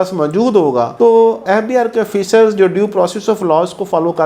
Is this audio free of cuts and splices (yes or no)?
yes